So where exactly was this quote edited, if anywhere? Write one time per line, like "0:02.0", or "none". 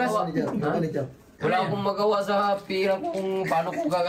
0:01.2